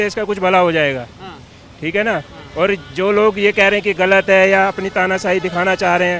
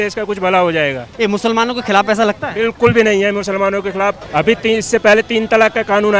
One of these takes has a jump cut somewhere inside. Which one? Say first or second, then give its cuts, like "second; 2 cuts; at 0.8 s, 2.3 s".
second; 2 cuts; at 1.0 s, 4.2 s